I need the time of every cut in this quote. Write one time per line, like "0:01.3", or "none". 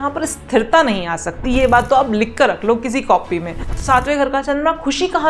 0:03.7